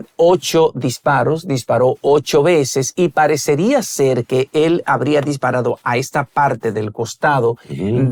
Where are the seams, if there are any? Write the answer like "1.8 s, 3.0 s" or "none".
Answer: none